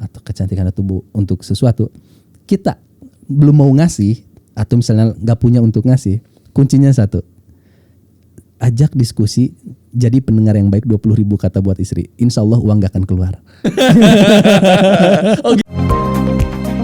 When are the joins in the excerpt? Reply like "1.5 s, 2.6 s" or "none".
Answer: 15.6 s